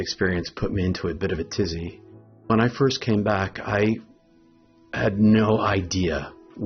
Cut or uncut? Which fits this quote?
cut